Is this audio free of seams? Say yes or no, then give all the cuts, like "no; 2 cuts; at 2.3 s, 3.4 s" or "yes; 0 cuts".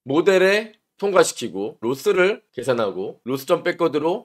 no; 2 cuts; at 1.8 s, 3.2 s